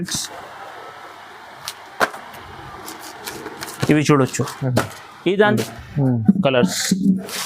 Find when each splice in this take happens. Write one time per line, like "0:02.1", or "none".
0:05.5